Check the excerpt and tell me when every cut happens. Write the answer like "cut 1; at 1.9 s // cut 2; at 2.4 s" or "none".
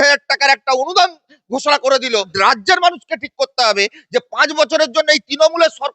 cut 1; at 2.3 s